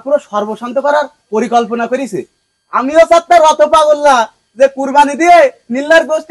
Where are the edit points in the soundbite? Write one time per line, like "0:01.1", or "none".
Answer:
none